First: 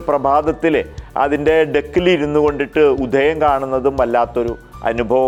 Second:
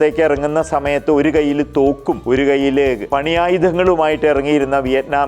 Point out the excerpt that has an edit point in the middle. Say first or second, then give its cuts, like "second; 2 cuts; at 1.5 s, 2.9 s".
second; 2 cuts; at 2.2 s, 3.0 s